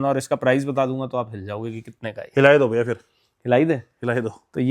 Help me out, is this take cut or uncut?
uncut